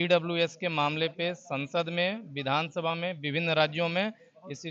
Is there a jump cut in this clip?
no; 0 cuts

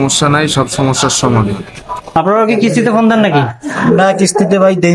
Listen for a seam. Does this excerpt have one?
yes; 1 cut; at 2.1 s

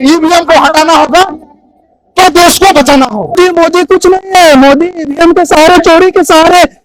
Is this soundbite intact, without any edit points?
no; 1 cut; at 3.3 s

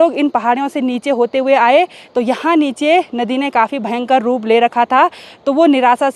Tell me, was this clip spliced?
no; 0 cuts

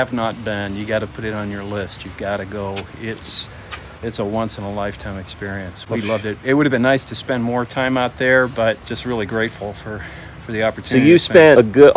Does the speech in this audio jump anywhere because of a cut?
no; 0 cuts

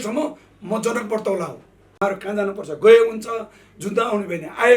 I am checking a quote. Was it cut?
yes; 1 cut; at 2.0 s

